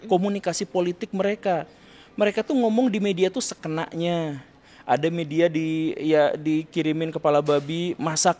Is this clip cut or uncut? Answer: uncut